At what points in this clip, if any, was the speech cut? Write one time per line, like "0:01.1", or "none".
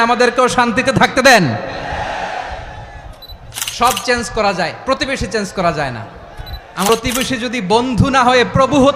0:06.9

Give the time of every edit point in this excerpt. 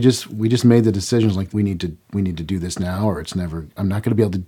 0:01.5

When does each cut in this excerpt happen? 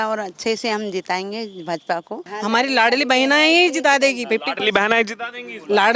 0:02.3

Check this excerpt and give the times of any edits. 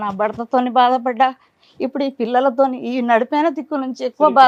none

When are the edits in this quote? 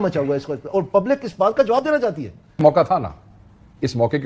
0:02.6

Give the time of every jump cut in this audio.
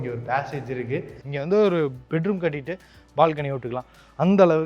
0:01.2

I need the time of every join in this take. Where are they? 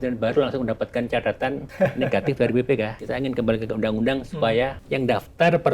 0:01.7
0:03.0
0:04.8

